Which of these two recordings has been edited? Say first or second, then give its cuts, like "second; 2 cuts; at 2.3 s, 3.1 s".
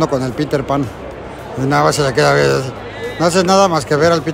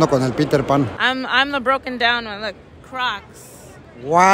second; 1 cut; at 1.0 s